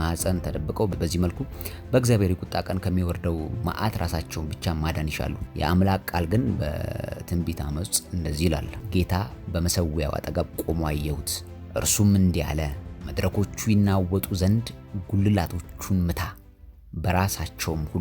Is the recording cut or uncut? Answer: cut